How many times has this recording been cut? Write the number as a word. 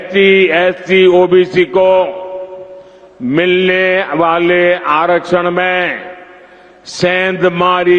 zero